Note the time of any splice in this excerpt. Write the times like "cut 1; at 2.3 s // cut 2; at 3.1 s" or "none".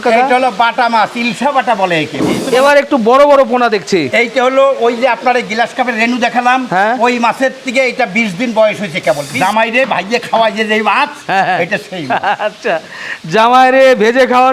cut 1; at 2.4 s // cut 2; at 9.3 s